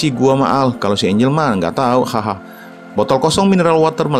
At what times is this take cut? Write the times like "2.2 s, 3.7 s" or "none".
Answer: none